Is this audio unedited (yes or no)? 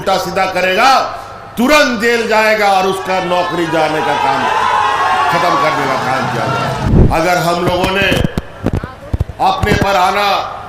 no